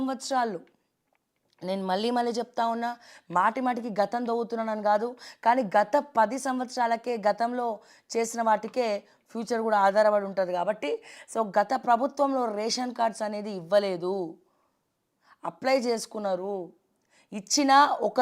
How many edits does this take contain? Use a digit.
1